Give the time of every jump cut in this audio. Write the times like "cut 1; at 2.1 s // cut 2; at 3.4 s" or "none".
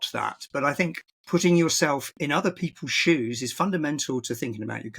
cut 1; at 1.1 s // cut 2; at 2.1 s